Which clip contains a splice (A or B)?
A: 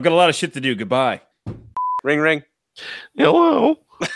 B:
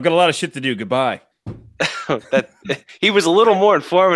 A